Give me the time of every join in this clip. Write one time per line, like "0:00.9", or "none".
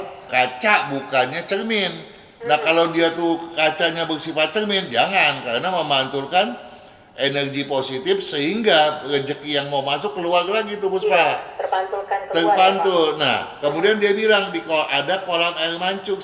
none